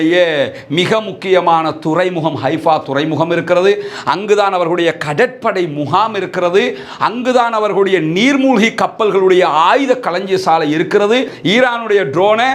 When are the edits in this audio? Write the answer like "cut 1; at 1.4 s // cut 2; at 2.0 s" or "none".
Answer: cut 1; at 11.3 s